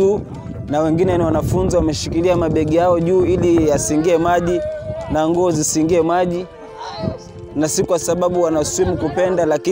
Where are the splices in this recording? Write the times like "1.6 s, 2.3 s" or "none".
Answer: 7.4 s